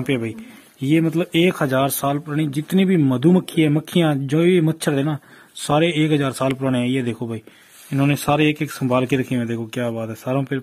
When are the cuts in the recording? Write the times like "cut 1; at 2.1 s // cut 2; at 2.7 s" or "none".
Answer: none